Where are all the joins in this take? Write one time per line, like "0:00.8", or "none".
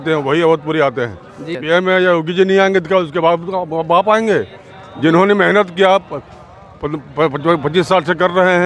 0:01.5